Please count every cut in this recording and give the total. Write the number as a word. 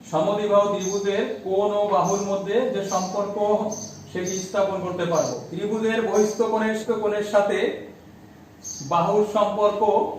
two